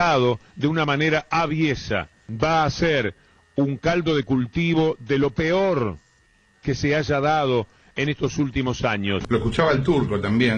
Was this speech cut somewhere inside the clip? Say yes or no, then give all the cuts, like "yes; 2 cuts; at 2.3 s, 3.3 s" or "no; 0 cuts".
yes; 1 cut; at 9.2 s